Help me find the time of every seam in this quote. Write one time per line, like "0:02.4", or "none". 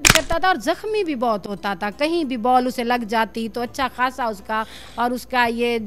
none